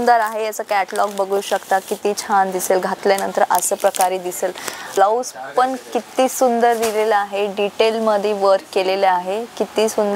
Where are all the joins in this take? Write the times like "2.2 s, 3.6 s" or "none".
4.9 s